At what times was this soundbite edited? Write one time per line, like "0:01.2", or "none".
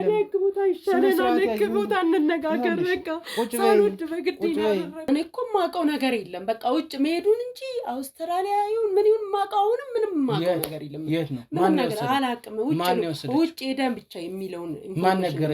0:05.0